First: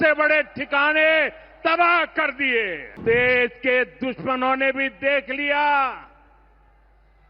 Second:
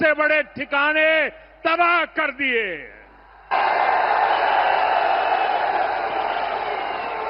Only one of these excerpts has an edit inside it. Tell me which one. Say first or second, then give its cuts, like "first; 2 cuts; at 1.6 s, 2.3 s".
first; 1 cut; at 3.0 s